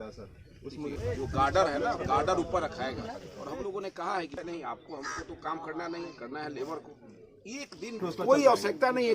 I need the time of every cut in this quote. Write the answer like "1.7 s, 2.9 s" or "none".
0.9 s, 4.4 s, 8.0 s